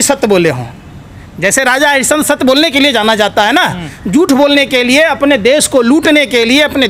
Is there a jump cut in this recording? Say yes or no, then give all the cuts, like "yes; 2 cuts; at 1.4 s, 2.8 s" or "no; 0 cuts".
no; 0 cuts